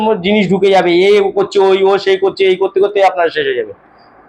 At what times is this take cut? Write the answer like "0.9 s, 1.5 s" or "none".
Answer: none